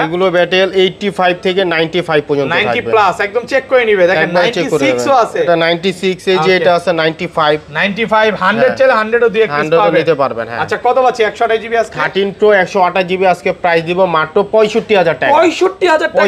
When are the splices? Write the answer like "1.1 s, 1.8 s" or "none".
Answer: none